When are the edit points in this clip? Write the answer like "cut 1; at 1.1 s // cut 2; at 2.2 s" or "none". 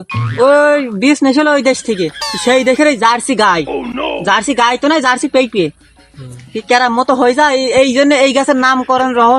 none